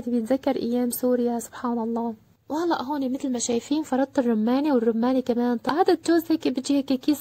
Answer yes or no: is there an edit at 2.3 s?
yes